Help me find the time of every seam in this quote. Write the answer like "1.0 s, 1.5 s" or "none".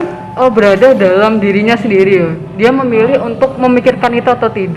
none